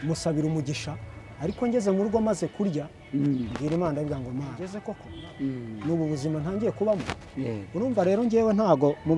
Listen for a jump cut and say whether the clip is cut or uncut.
cut